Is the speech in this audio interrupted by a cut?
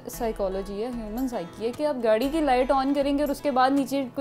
no; 0 cuts

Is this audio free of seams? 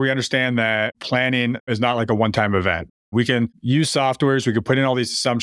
no; 1 cut; at 1.4 s

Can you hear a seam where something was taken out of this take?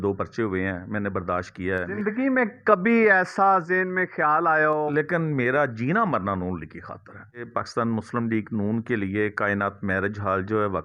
yes; 3 cuts; at 1.9 s, 4.9 s, 7.5 s

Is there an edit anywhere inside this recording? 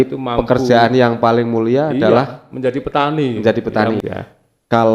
yes; 1 cut; at 4.0 s

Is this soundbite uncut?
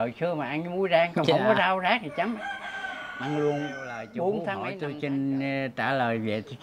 no; 1 cut; at 4.7 s

